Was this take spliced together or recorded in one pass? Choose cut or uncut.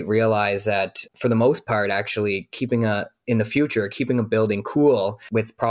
uncut